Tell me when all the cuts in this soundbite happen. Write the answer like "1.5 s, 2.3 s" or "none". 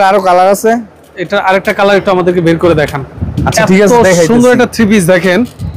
none